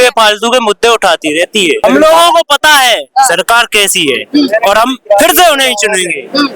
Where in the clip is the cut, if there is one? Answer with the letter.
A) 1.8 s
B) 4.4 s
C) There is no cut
A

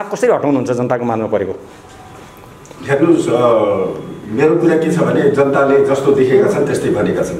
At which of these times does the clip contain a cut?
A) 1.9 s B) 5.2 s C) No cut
C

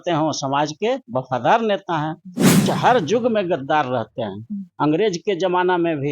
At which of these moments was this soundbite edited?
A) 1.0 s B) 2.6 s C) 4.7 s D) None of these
B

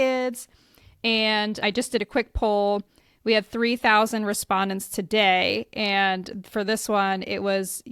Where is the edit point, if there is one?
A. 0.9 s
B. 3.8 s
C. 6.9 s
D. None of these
D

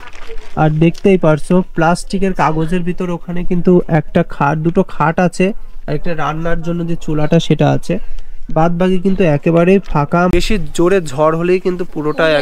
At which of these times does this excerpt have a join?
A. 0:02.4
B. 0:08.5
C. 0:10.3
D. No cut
C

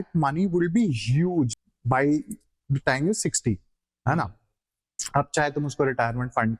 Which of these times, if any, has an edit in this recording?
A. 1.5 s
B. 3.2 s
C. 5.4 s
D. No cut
A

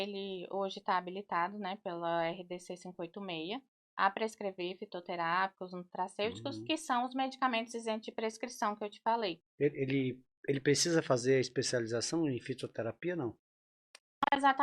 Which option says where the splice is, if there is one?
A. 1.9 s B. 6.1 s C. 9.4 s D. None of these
C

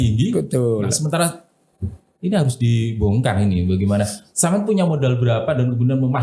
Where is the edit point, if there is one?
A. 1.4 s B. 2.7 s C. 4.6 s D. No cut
D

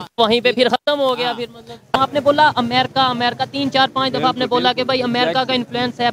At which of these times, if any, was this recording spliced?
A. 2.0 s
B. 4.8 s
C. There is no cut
A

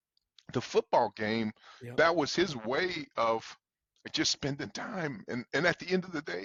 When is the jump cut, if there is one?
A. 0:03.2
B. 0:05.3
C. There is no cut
C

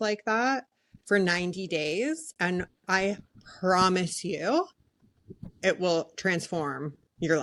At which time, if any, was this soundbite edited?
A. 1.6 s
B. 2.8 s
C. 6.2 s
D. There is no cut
D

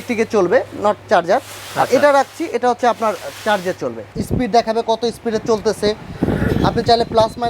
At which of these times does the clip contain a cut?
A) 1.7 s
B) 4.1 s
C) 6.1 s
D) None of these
B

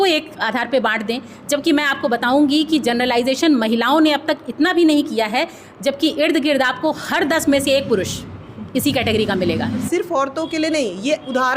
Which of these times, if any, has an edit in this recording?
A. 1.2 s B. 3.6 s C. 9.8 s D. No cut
C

